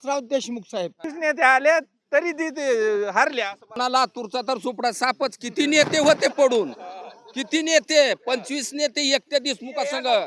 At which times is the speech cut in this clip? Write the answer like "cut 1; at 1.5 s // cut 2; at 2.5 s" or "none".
cut 1; at 1.1 s // cut 2; at 3.7 s

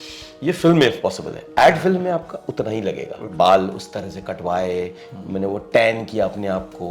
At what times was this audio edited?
cut 1; at 3.2 s

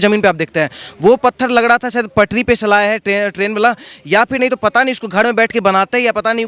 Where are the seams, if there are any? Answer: none

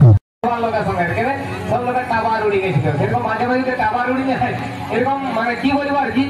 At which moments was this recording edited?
none

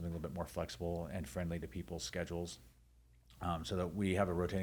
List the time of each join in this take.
none

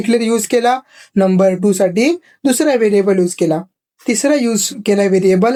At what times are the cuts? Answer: none

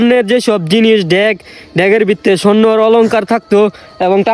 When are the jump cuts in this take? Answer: none

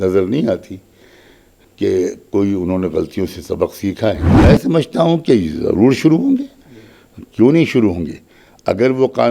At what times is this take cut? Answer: cut 1; at 4.3 s

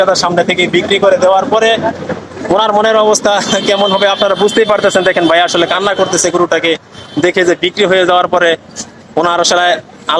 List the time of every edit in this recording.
none

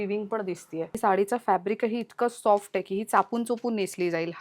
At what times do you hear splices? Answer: cut 1; at 1.0 s

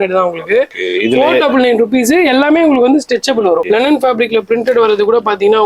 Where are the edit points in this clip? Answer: cut 1; at 3.6 s

